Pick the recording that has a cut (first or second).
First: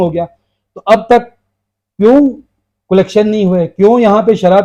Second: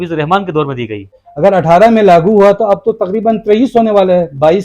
second